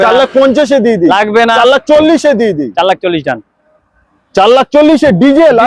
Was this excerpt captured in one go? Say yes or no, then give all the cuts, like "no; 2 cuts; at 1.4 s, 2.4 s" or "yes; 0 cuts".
yes; 0 cuts